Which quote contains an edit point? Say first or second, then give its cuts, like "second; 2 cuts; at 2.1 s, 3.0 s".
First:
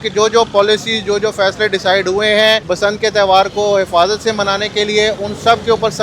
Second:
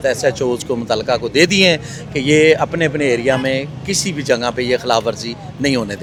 first; 1 cut; at 2.6 s